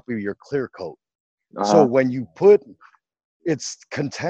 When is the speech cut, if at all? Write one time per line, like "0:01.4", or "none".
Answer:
none